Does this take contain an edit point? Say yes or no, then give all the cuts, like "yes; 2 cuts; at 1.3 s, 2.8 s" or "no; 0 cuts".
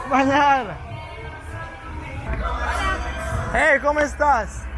yes; 1 cut; at 2.2 s